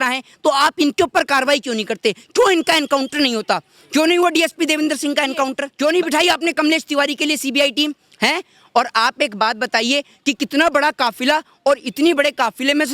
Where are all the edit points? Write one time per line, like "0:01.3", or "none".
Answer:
0:05.6

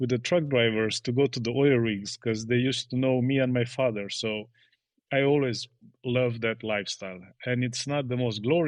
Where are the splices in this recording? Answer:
none

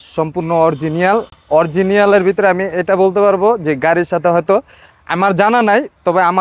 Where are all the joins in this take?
none

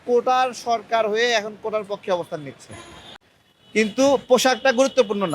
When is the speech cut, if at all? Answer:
0:03.3

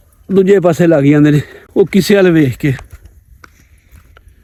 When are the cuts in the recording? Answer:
none

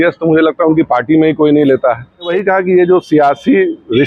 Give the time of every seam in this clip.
0:02.3

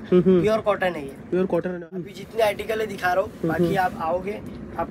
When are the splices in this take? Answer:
0:02.0

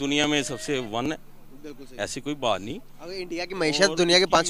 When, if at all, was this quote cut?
none

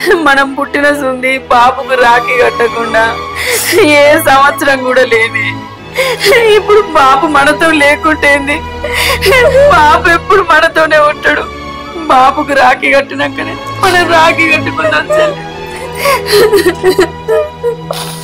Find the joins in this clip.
none

